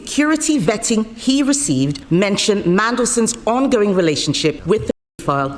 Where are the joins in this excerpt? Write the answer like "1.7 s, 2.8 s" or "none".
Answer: 2.0 s, 4.6 s